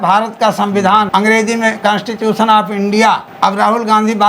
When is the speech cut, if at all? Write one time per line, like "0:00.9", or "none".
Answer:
0:01.1
0:03.3